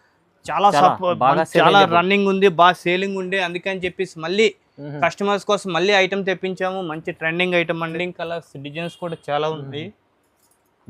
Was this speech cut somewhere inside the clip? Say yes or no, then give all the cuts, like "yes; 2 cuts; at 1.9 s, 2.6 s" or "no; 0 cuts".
yes; 1 cut; at 7.9 s